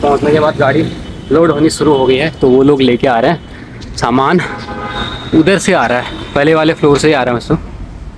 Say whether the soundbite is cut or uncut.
uncut